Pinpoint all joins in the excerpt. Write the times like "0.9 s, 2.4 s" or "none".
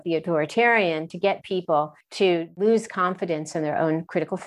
2.5 s